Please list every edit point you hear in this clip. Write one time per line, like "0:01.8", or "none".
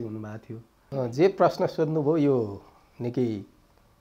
0:01.0